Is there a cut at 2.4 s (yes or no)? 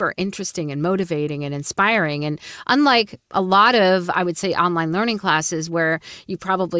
no